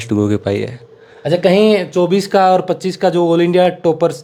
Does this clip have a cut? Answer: no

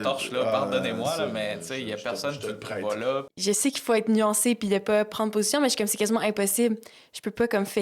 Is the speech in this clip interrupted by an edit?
yes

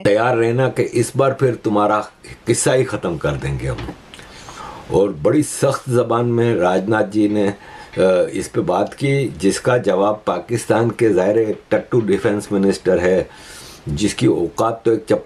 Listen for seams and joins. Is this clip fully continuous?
yes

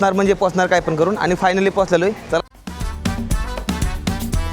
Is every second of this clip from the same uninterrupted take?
no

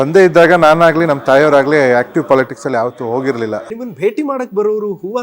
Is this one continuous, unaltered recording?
no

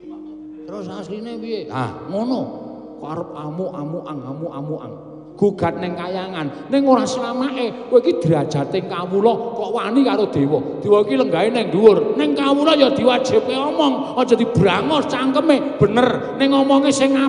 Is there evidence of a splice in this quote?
yes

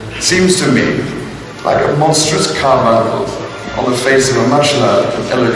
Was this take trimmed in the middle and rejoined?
no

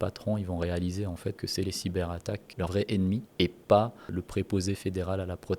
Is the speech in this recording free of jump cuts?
no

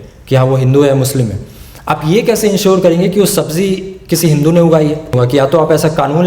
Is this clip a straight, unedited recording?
no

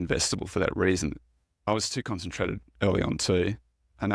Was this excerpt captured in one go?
no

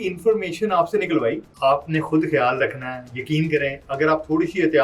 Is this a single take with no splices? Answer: no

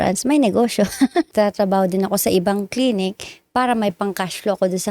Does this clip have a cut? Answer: yes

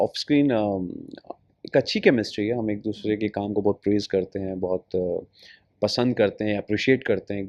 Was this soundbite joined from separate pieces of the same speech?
no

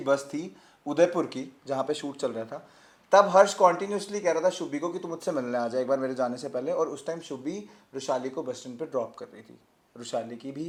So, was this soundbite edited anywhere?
no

